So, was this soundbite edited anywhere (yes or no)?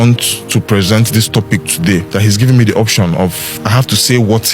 yes